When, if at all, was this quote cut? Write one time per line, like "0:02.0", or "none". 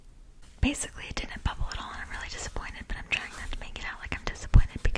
none